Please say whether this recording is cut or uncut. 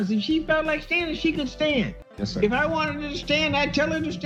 uncut